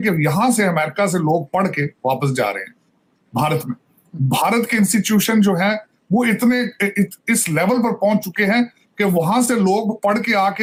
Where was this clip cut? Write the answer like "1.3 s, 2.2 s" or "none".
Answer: none